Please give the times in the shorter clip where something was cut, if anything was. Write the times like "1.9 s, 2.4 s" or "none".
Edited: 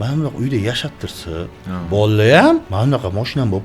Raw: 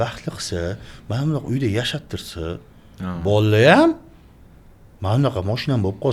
1.6 s, 2.7 s